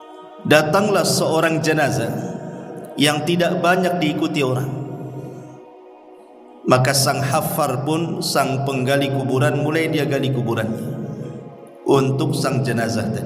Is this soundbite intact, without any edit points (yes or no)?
no